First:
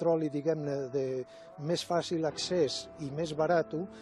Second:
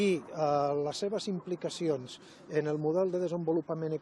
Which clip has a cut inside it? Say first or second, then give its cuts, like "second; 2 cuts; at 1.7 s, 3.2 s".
second; 1 cut; at 2.8 s